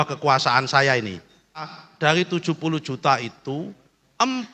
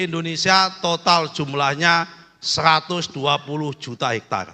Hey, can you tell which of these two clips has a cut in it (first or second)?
first